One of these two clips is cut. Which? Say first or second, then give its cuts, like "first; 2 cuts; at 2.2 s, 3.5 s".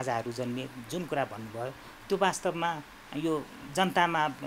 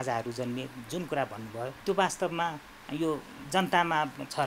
second; 1 cut; at 1.8 s